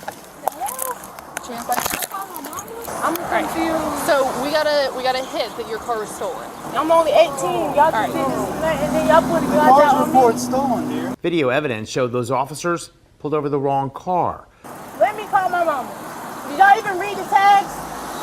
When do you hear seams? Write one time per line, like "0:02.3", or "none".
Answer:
0:02.9
0:06.5
0:11.1
0:14.5